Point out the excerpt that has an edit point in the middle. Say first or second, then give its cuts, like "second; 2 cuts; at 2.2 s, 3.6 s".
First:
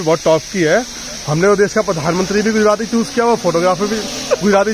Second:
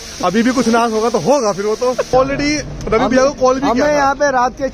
second; 1 cut; at 2.1 s